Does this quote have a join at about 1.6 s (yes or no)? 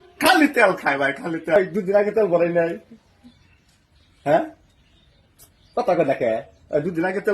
yes